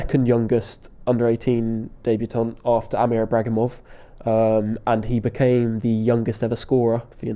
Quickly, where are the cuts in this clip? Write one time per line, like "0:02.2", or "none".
none